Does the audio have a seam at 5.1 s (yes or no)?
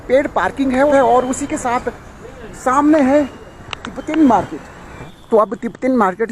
yes